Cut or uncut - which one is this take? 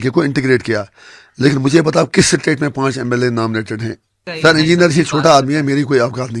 cut